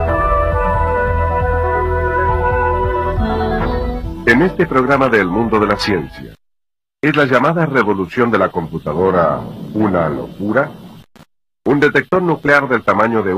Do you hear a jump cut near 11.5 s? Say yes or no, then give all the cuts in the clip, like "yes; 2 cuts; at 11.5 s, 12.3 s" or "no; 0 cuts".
yes; 1 cut; at 11.5 s